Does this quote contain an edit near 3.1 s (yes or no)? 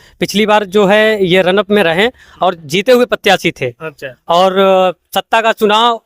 no